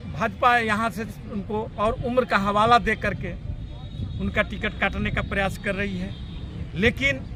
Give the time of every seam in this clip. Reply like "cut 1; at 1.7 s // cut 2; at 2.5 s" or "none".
none